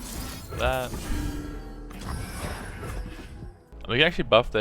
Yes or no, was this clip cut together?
yes